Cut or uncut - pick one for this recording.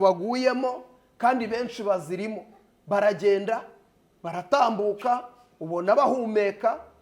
uncut